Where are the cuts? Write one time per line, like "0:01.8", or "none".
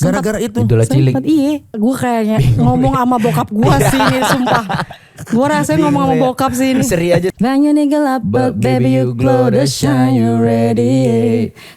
0:01.8
0:07.3